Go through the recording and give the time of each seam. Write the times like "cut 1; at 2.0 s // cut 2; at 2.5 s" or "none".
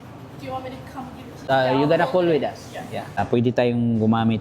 cut 1; at 1.4 s // cut 2; at 3.2 s